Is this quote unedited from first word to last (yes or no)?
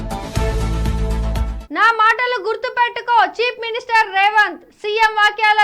no